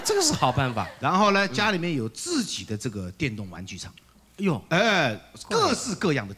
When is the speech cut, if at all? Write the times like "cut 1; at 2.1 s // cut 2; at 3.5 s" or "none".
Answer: none